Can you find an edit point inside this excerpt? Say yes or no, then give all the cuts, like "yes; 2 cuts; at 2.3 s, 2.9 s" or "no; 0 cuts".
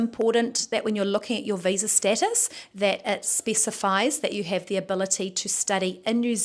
no; 0 cuts